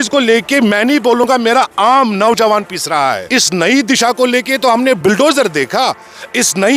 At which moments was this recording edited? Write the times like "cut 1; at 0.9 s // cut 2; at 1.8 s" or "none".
cut 1; at 3.2 s